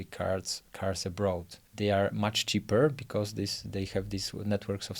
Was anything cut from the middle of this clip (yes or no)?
yes